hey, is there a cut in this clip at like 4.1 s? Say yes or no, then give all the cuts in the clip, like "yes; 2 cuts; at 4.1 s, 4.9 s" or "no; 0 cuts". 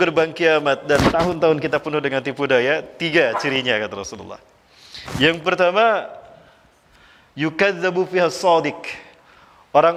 no; 0 cuts